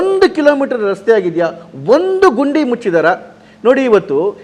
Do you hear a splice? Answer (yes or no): no